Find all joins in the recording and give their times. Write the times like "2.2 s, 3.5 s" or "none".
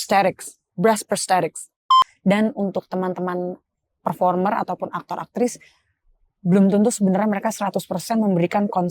2.0 s